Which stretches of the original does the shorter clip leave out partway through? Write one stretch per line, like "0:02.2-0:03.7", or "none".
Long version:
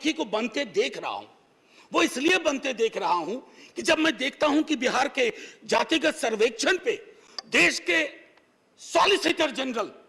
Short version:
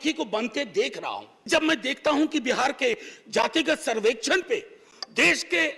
0:01.3-0:03.7